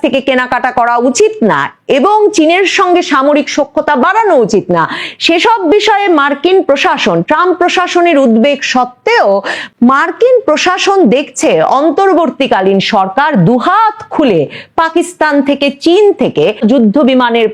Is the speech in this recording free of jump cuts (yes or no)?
no